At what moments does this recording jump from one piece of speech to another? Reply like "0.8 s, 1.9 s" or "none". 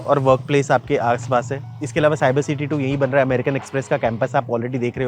none